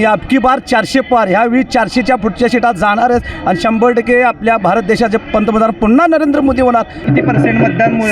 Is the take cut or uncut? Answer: cut